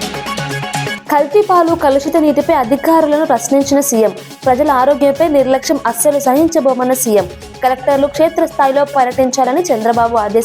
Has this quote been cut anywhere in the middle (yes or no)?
yes